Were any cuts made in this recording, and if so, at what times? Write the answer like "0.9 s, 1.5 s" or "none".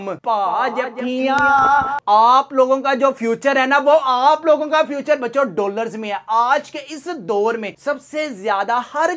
2.0 s